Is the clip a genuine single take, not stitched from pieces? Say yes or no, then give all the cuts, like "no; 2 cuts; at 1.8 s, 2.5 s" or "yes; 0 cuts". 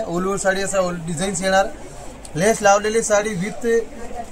yes; 0 cuts